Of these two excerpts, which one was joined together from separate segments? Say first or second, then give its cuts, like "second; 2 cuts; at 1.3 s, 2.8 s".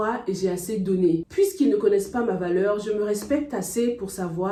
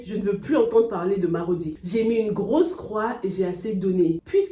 second; 1 cut; at 1.8 s